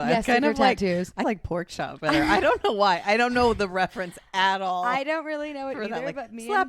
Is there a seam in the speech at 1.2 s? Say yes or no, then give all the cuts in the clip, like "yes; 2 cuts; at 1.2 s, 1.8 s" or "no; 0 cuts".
yes; 1 cut; at 1.2 s